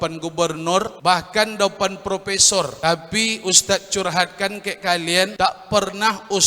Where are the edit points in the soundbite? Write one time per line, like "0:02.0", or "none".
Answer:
0:00.9
0:02.7
0:05.3